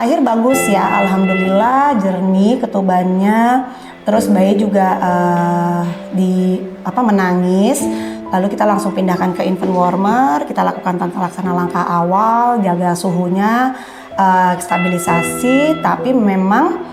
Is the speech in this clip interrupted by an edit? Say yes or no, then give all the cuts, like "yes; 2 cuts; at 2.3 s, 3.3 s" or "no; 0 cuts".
no; 0 cuts